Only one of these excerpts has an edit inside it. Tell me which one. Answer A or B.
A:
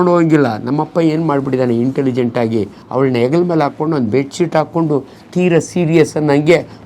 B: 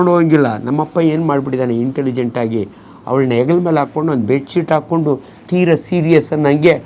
A